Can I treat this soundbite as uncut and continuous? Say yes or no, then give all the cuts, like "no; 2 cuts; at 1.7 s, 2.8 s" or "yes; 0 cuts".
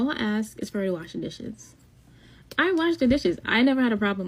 yes; 0 cuts